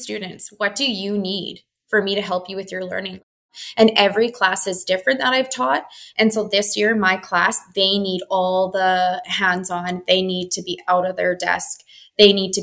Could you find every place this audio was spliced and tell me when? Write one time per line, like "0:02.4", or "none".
0:03.4